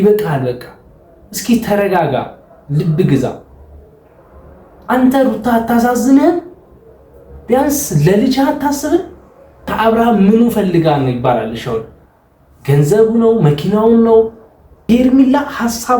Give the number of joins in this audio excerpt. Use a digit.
2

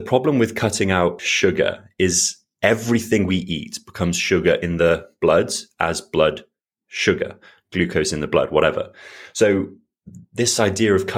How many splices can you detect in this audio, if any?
1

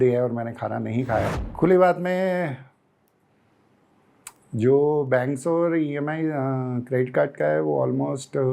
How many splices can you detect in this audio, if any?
1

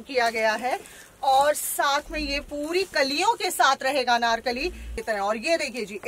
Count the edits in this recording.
1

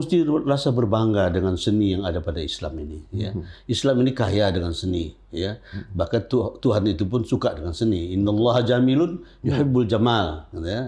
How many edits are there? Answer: 0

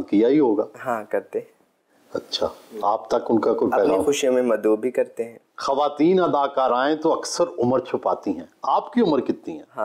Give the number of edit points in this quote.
0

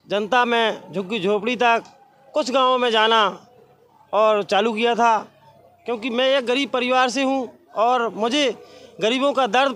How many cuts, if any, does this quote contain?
0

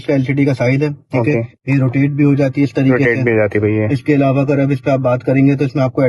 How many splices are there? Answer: 0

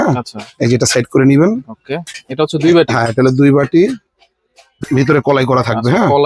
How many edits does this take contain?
0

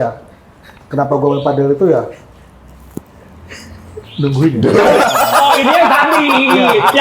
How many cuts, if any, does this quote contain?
1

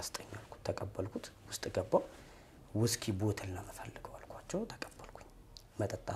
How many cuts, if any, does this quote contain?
0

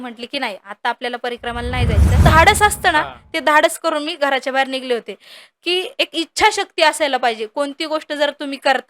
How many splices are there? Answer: 1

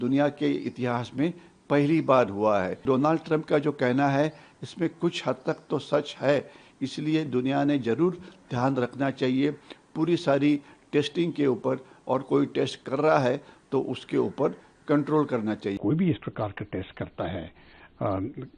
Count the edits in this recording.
2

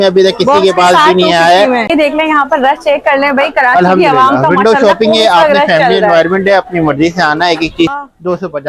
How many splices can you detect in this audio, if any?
2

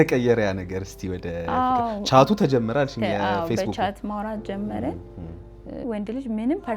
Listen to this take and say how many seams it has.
1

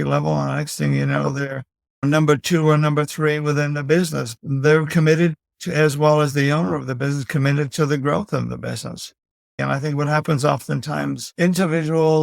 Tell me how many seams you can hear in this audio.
1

